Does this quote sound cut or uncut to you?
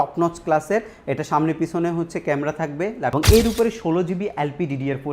cut